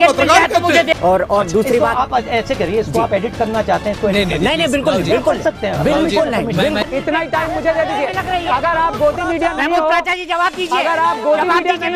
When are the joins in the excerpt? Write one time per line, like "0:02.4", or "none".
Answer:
0:00.9
0:06.8